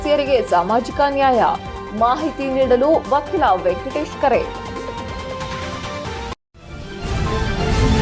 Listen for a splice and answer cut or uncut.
cut